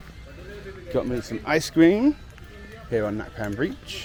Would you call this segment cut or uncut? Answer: uncut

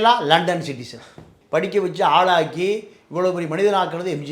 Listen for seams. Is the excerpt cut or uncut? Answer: cut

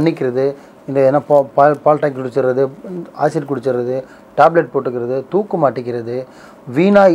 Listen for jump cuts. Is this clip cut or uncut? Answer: uncut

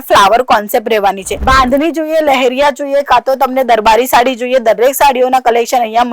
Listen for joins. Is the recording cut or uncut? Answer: cut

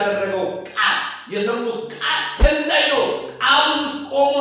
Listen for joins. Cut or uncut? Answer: cut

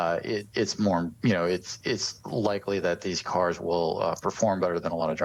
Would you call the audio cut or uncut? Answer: uncut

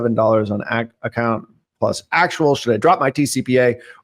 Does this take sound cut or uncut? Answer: uncut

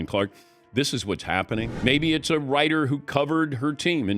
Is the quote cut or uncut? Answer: cut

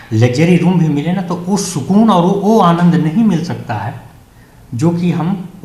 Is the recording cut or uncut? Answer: uncut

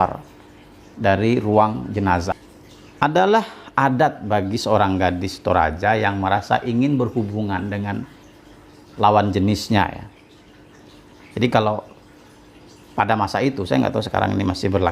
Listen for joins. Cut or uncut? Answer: cut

